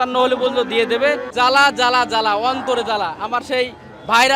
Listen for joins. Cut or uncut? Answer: cut